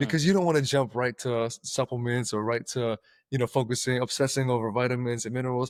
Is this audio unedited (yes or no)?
yes